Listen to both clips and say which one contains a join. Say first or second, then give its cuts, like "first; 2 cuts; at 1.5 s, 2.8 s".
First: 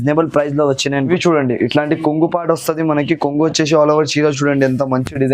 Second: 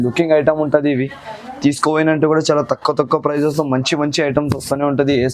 first; 1 cut; at 1.1 s